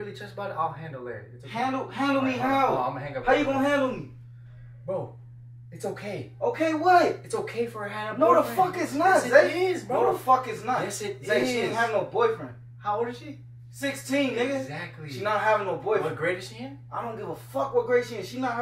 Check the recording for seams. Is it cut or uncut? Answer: uncut